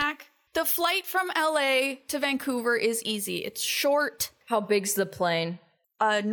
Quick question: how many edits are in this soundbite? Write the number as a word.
one